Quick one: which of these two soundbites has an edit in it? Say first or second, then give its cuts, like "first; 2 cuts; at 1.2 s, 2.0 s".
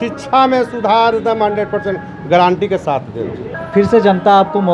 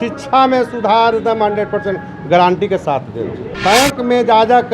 second; 1 cut; at 3.5 s